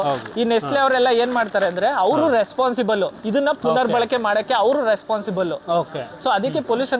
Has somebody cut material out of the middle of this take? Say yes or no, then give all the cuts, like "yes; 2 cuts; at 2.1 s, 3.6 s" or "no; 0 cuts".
no; 0 cuts